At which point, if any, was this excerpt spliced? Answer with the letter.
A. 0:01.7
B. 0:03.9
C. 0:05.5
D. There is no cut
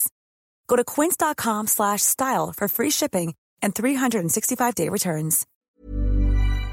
C